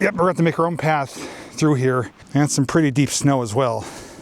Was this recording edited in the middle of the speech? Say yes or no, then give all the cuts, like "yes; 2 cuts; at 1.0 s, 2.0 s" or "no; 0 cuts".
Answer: yes; 1 cut; at 2.2 s